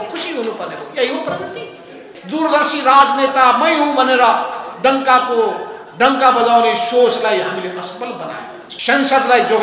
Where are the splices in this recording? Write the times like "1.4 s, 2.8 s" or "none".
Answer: 2.1 s, 8.6 s

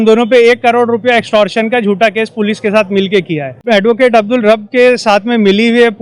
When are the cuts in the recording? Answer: 3.6 s

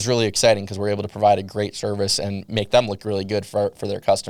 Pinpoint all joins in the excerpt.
none

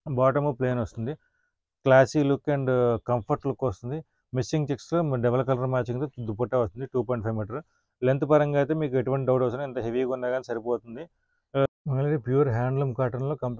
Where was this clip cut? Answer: 11.7 s

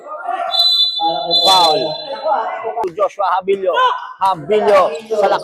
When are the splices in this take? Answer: 2.8 s

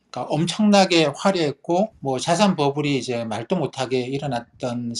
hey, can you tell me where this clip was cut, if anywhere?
2.0 s

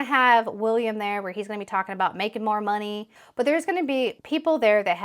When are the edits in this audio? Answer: 3.1 s

